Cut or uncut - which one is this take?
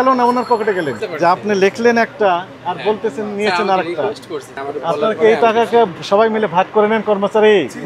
cut